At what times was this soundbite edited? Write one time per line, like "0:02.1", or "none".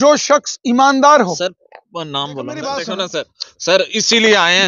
0:02.5